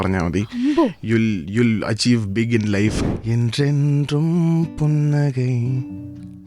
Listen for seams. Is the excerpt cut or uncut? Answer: cut